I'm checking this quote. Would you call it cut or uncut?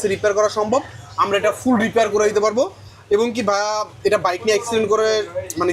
uncut